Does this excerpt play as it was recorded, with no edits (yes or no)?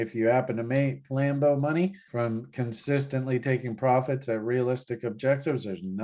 yes